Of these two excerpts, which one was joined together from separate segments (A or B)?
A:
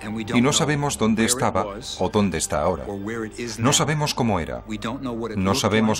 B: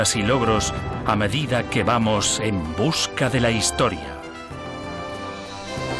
A